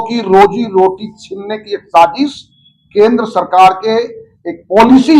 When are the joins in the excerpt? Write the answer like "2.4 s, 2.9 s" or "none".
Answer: none

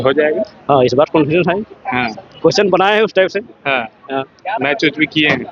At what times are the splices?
none

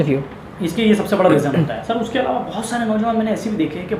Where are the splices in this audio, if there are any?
none

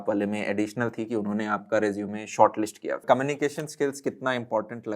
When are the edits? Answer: 3.0 s

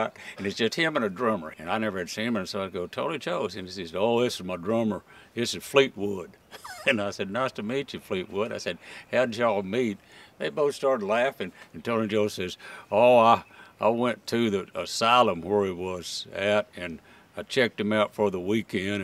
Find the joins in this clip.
1.5 s

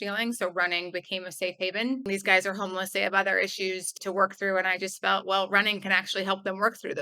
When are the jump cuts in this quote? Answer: 2.0 s, 3.9 s

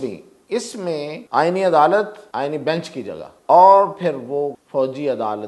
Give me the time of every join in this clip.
1.2 s, 2.2 s, 3.3 s, 4.6 s

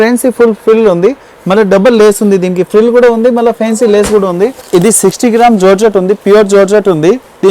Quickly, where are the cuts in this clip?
4.6 s

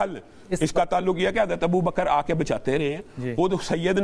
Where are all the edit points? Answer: none

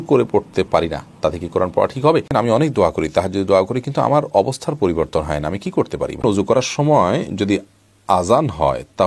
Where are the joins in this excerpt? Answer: 2.3 s, 6.2 s

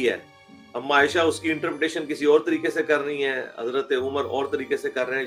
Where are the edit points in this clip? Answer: none

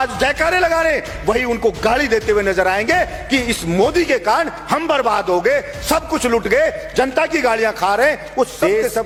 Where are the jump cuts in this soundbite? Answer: none

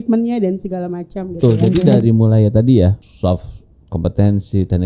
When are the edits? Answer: 1.4 s, 3.0 s

